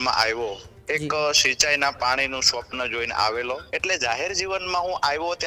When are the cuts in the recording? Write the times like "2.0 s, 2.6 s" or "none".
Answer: 3.7 s